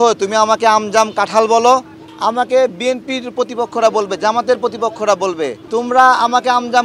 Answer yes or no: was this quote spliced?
yes